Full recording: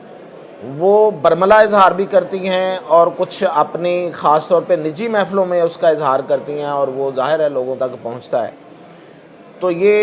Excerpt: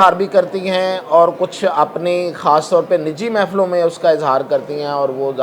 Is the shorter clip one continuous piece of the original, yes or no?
yes